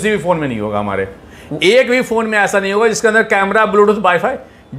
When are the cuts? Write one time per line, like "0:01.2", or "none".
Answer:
none